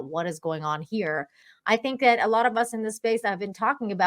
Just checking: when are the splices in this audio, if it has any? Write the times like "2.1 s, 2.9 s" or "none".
1.4 s